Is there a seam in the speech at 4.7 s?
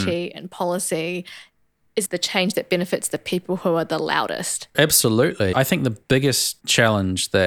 no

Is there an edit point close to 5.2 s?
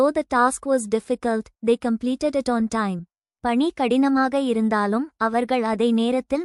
no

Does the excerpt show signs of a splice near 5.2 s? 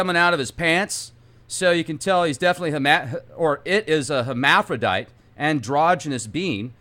no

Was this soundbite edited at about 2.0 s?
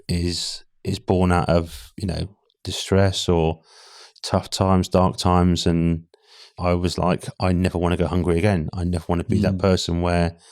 no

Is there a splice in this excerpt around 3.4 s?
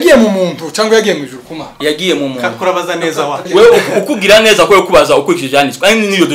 yes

